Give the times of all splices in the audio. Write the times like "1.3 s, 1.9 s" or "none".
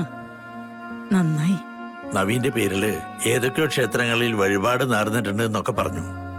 none